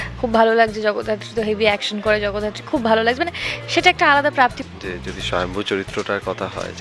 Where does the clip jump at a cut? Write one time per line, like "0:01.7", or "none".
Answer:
0:04.6